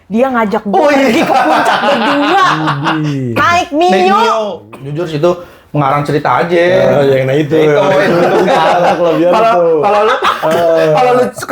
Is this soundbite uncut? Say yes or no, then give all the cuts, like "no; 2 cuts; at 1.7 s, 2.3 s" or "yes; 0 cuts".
no; 1 cut; at 4.7 s